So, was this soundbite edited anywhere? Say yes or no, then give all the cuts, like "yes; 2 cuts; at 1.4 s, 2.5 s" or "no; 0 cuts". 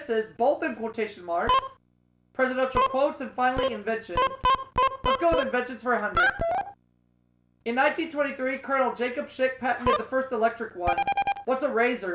yes; 1 cut; at 2.9 s